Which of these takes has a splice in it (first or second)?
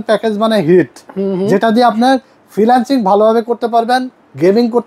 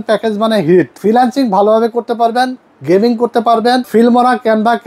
second